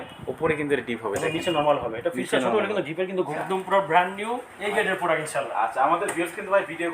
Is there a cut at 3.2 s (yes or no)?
yes